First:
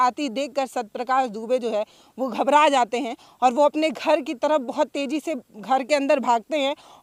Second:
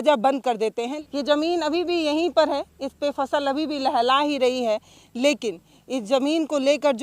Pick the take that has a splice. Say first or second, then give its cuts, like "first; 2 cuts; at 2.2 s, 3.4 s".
second; 1 cut; at 0.9 s